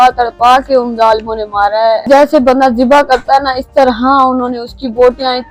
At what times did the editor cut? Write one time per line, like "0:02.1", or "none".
0:02.0

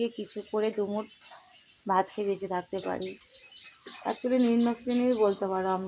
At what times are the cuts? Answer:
0:03.9

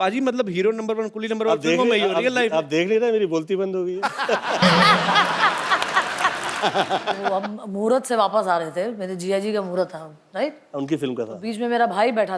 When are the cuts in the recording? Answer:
0:06.6

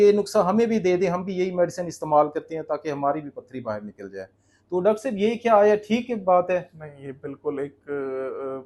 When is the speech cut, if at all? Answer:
none

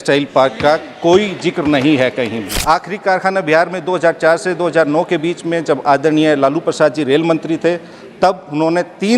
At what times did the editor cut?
0:02.6

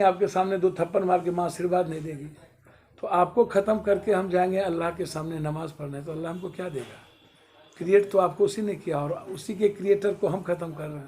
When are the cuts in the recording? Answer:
none

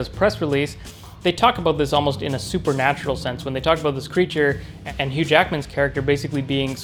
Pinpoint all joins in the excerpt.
none

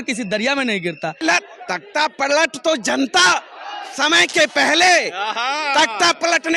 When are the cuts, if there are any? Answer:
0:01.2

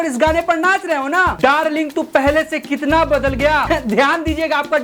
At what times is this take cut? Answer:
none

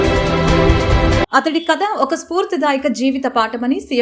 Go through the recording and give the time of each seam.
none

